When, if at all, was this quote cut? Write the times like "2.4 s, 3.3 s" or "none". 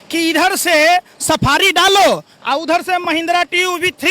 none